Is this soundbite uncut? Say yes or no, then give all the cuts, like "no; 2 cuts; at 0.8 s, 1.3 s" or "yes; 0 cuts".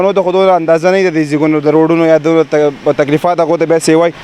yes; 0 cuts